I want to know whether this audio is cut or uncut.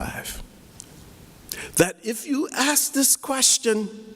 cut